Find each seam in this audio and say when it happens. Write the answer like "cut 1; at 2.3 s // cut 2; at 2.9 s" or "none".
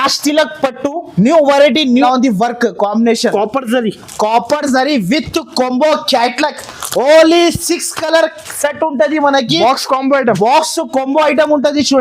cut 1; at 2.0 s